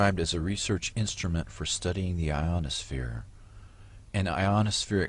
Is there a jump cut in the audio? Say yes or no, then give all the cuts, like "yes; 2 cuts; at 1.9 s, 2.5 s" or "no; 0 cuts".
no; 0 cuts